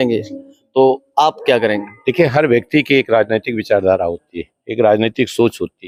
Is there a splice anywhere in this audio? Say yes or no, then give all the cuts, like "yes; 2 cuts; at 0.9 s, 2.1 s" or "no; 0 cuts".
no; 0 cuts